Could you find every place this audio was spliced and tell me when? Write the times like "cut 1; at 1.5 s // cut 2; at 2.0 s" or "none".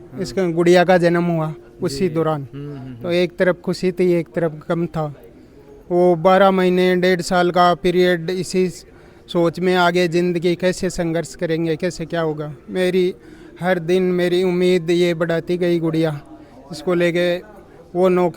none